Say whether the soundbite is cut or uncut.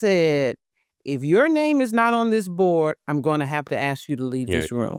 uncut